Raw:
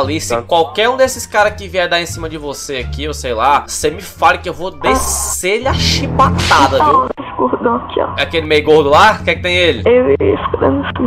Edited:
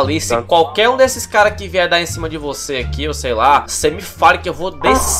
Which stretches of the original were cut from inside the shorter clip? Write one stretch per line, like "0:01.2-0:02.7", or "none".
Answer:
none